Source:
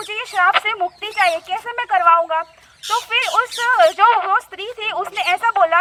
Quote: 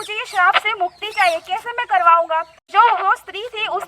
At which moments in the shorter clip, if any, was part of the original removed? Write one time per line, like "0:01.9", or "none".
0:02.7